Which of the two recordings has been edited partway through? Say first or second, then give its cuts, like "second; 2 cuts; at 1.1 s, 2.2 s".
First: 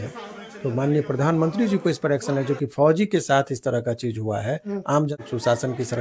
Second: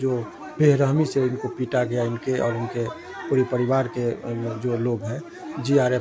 first; 1 cut; at 5.1 s